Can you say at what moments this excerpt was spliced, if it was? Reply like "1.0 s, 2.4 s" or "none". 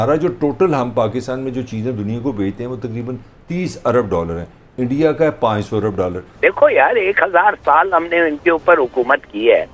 6.3 s